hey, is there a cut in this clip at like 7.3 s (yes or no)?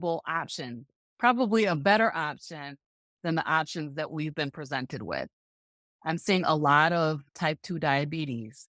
yes